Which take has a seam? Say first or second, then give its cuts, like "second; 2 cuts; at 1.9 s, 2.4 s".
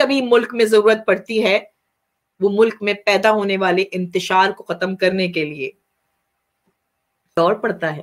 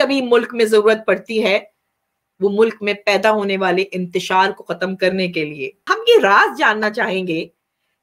second; 1 cut; at 5.7 s